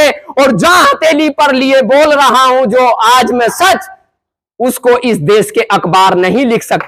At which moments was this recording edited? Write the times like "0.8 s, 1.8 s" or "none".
none